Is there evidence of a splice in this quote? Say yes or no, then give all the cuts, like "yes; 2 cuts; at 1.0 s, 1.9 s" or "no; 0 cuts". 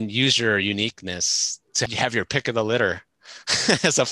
yes; 1 cut; at 1.9 s